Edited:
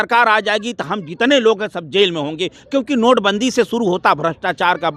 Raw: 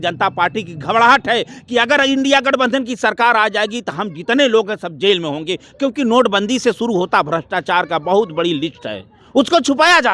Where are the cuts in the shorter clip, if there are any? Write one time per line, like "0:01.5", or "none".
none